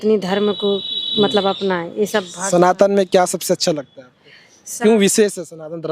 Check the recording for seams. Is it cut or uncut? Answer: uncut